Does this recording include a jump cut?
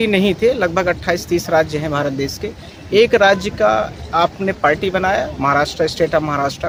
no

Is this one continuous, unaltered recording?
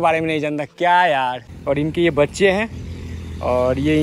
no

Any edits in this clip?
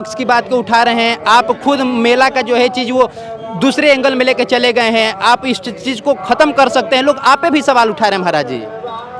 no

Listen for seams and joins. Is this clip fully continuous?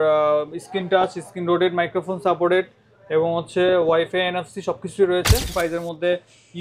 no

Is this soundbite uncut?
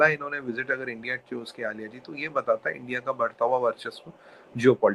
yes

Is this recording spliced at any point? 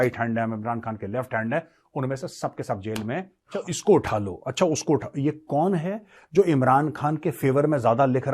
yes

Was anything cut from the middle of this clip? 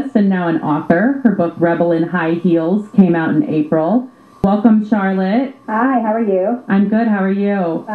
yes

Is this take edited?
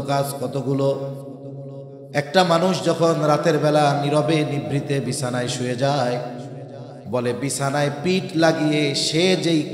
no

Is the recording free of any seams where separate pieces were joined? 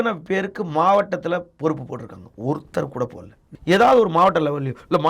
no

